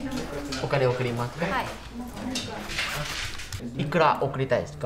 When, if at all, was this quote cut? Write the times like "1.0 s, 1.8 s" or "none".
3.6 s

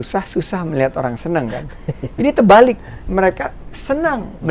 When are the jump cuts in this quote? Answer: none

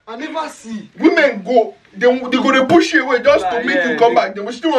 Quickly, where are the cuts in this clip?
none

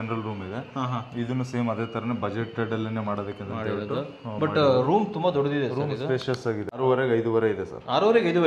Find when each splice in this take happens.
6.8 s

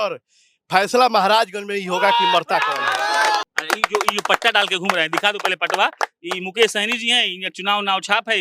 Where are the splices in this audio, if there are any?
3.5 s

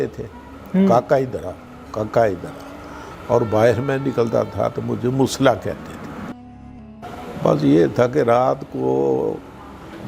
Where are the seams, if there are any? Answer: 6.6 s

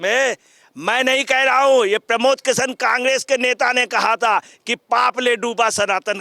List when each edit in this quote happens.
none

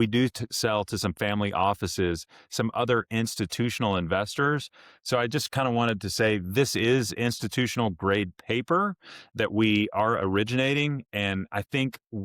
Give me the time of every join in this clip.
none

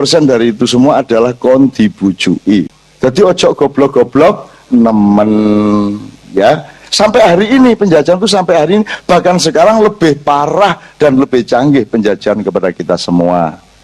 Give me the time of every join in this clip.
2.8 s

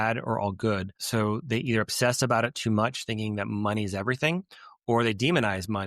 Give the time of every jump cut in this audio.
1.0 s

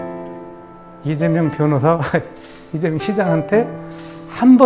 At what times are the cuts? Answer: 1.1 s

